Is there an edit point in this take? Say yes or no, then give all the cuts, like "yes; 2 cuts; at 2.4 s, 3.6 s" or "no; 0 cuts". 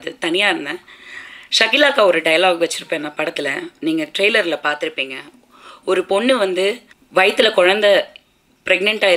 yes; 1 cut; at 6.9 s